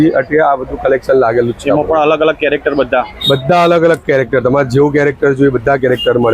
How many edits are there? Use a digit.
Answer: 0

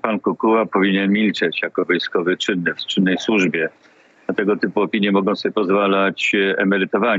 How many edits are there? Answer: 0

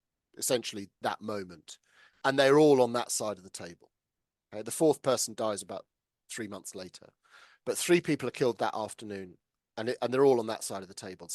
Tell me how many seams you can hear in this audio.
1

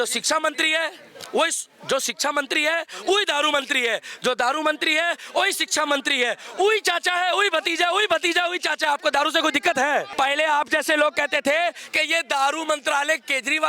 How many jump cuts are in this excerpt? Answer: 1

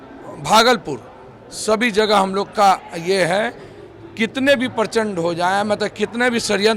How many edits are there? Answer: 0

